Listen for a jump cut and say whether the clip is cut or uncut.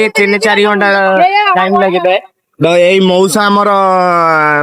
uncut